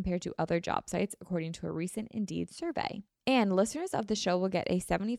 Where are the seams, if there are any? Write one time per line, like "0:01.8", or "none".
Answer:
0:03.1